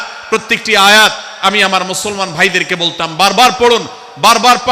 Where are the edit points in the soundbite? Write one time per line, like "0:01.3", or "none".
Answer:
none